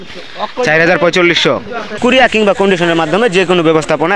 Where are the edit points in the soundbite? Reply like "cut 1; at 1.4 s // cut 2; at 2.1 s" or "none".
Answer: cut 1; at 1.9 s